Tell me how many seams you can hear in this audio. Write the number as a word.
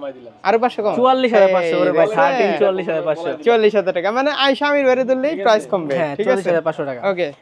zero